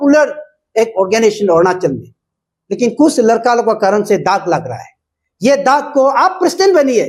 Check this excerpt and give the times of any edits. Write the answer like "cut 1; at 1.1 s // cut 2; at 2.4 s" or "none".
none